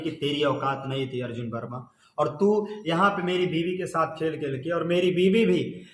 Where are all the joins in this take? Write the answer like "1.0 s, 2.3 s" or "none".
none